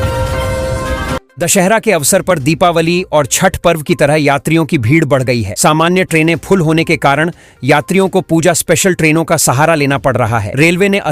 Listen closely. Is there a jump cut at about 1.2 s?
yes; 1 cut; at 1.2 s

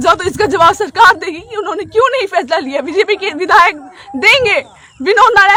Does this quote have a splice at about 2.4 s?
no; 0 cuts

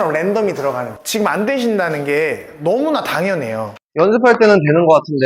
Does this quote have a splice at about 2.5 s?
no; 2 cuts; at 0.9 s, 3.9 s

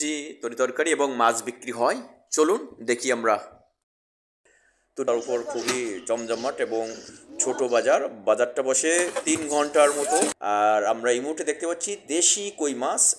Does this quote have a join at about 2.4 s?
no; 2 cuts; at 5.0 s, 10.4 s

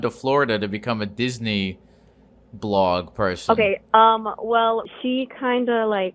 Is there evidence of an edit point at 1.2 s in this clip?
no; 1 cut; at 4.9 s

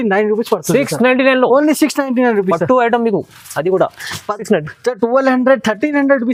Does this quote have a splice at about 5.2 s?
no; 0 cuts

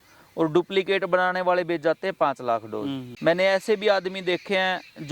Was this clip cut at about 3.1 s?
yes; 1 cut; at 3.1 s

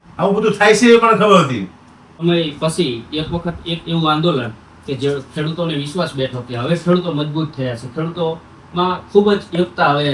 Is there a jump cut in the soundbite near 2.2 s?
yes; 1 cut; at 2.2 s

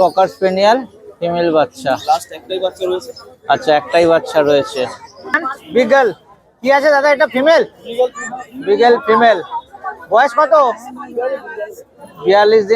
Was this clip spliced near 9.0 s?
no; 1 cut; at 5.5 s

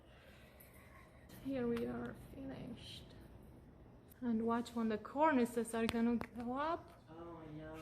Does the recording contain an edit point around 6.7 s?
no; 2 cuts; at 1.3 s, 4.1 s

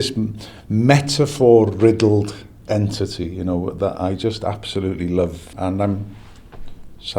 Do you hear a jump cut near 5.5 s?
yes; 1 cut; at 5.5 s

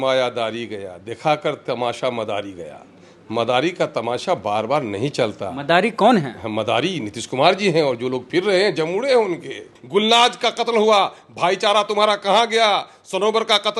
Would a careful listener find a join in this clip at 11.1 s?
no; 1 cut; at 9.7 s

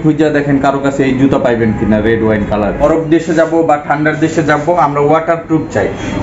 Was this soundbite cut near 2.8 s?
yes; 1 cut; at 2.8 s

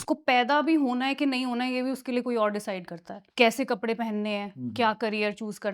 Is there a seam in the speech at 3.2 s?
yes; 1 cut; at 3.2 s

